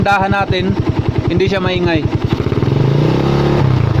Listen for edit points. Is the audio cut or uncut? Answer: uncut